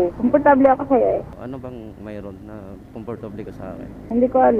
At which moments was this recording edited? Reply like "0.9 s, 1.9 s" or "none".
1.3 s